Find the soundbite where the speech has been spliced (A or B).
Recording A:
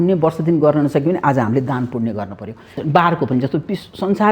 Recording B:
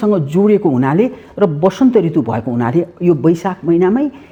A